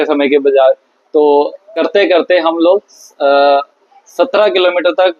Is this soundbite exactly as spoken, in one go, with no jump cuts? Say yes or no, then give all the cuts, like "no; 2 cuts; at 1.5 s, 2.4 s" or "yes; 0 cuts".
no; 1 cut; at 1.6 s